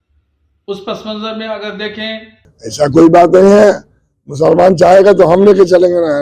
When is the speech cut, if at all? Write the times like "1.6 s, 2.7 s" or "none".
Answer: 2.2 s